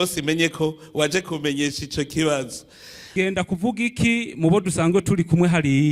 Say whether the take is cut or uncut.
cut